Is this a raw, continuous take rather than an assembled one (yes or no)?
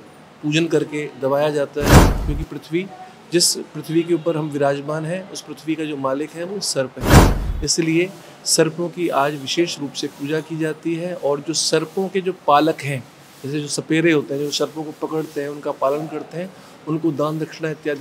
yes